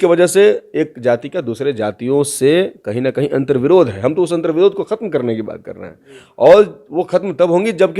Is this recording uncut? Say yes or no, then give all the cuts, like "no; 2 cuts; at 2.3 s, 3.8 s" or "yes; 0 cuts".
yes; 0 cuts